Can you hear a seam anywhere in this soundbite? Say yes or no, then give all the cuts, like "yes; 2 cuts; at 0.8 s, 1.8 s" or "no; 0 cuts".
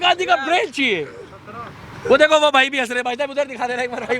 no; 0 cuts